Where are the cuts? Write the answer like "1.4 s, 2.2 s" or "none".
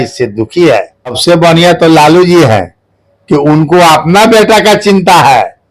1.2 s